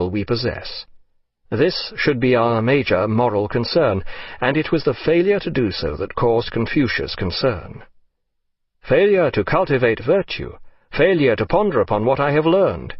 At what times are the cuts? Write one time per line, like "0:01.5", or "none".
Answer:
0:03.5